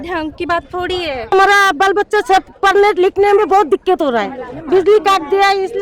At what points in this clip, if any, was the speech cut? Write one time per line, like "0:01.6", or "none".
0:01.3